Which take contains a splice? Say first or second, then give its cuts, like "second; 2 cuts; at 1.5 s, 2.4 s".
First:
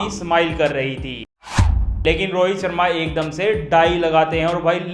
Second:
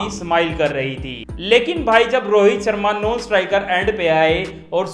first; 1 cut; at 1.4 s